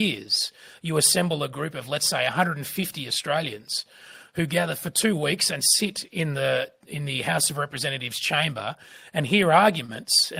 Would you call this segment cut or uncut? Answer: uncut